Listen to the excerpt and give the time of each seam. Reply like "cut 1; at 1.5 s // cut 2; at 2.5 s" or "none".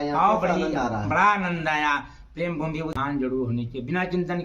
cut 1; at 2.9 s